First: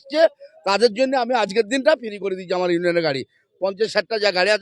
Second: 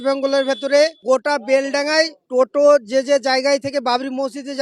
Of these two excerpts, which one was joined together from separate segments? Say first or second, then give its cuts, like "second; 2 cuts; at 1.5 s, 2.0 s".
second; 2 cuts; at 1.0 s, 2.2 s